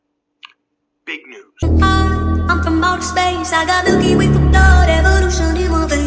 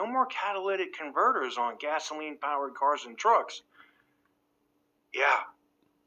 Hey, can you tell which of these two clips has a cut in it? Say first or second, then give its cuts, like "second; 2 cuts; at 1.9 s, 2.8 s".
first; 1 cut; at 1.5 s